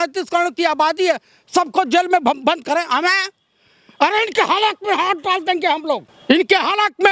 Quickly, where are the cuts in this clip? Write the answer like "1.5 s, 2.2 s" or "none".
6.1 s